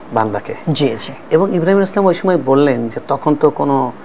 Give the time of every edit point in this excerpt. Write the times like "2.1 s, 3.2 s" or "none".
none

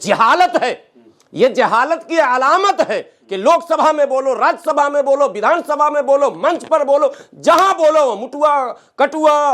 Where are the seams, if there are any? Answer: none

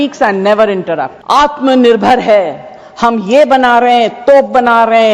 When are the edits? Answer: 1.1 s

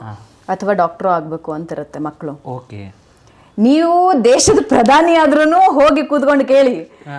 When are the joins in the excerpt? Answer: none

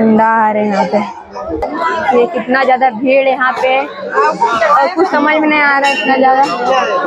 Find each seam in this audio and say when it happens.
1.7 s

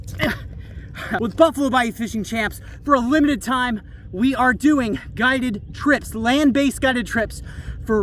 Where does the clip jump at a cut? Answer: 1.2 s

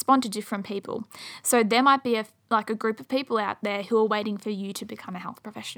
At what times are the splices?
none

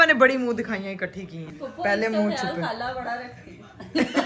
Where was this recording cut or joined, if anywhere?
1.5 s

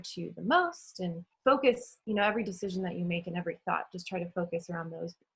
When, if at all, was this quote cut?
1.3 s, 1.9 s

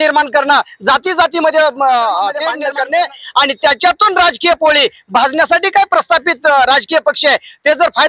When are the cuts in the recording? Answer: 2.5 s

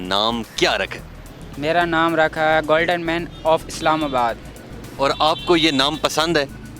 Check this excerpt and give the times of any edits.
none

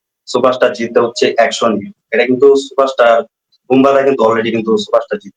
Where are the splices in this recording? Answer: none

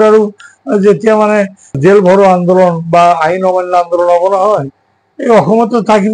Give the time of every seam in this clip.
1.7 s

